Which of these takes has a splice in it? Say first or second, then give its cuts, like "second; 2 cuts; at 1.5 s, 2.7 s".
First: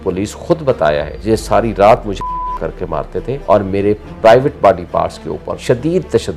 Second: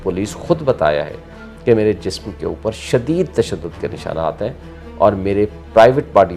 first; 3 cuts; at 1.1 s, 3.3 s, 5.5 s